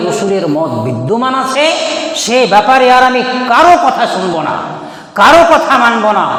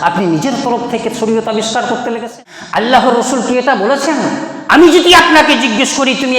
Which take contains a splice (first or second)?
second